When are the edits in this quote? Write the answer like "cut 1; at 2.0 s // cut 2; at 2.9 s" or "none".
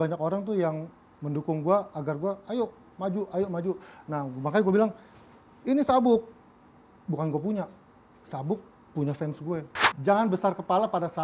cut 1; at 9.8 s